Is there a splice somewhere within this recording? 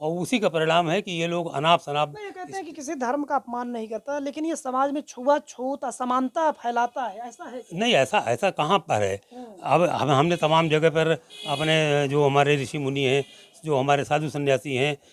no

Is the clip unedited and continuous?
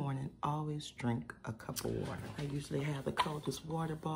no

